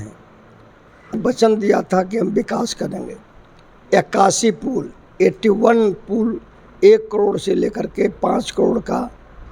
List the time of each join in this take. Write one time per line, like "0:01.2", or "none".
0:01.1